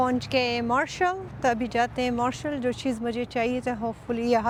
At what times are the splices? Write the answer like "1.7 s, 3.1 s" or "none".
none